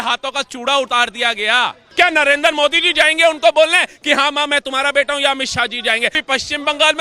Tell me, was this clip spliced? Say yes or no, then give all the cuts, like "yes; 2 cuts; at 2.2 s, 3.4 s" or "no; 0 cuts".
yes; 2 cuts; at 1.9 s, 6.2 s